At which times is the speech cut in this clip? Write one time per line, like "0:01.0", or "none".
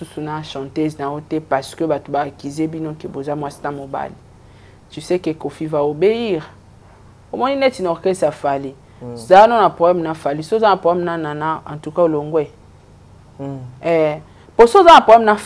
0:07.2